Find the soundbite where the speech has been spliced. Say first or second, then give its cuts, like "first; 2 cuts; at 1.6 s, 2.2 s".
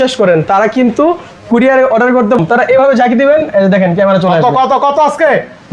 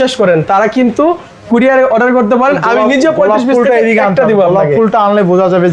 first; 1 cut; at 2.4 s